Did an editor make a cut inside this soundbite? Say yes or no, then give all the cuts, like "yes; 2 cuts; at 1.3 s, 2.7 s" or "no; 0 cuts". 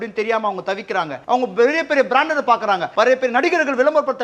no; 0 cuts